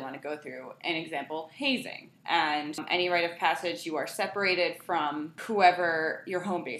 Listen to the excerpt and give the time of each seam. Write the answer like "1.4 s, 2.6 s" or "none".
2.8 s, 5.4 s

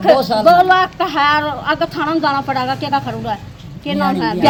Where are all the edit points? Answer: none

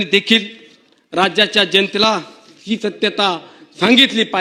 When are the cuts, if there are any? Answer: none

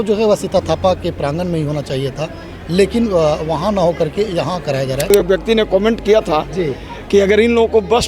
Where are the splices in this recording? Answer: 5.1 s

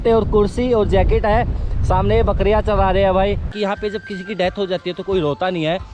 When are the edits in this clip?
3.5 s

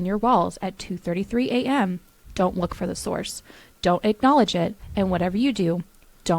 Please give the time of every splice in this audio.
none

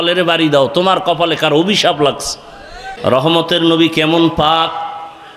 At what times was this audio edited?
2.8 s

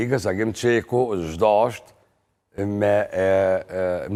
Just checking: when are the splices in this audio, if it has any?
none

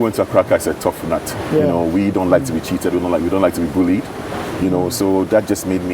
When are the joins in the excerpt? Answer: none

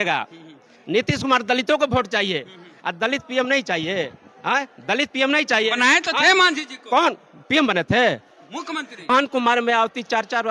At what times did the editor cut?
9.1 s

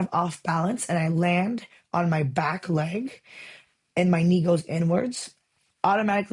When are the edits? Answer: none

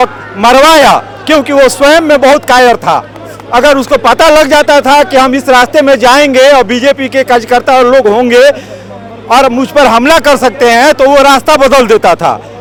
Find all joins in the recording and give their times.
none

